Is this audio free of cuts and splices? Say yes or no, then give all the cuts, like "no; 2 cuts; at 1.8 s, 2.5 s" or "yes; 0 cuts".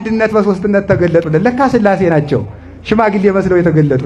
yes; 0 cuts